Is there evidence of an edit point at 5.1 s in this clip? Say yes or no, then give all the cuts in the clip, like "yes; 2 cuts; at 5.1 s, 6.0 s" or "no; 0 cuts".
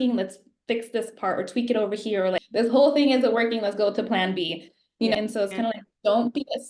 yes; 2 cuts; at 2.4 s, 5.1 s